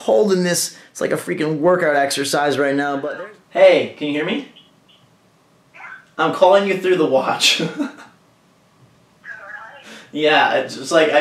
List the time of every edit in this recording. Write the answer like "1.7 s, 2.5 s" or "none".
3.1 s